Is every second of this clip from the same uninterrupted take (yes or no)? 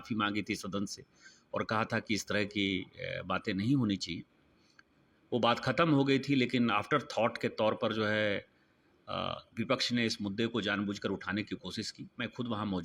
yes